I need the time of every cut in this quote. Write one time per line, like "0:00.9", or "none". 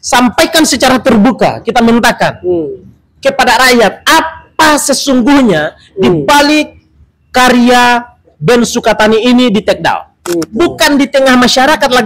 0:10.5